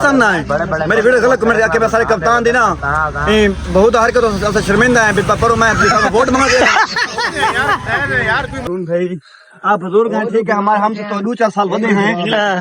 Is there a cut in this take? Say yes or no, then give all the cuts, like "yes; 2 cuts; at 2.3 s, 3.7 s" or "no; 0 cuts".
yes; 1 cut; at 8.6 s